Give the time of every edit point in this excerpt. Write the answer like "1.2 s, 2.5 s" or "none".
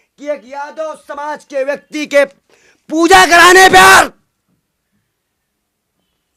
none